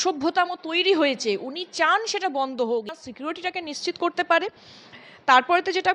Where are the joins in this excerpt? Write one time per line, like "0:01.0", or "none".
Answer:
0:02.9